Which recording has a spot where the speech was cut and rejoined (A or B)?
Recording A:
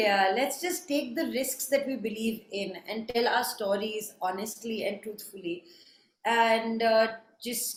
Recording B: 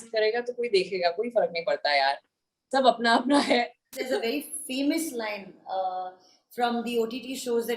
B